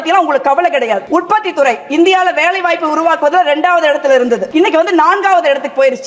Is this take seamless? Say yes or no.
no